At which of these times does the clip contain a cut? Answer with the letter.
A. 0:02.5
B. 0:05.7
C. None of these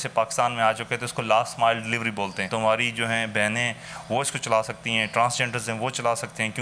A